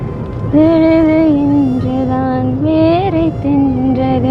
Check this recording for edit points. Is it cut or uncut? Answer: uncut